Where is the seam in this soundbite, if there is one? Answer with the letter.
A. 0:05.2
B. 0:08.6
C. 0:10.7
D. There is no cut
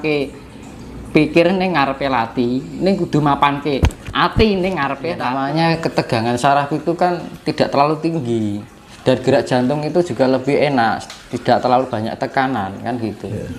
A